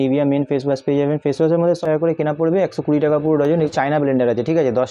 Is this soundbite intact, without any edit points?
no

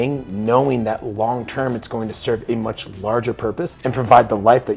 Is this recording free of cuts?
no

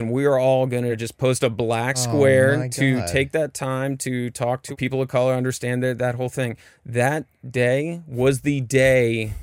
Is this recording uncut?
no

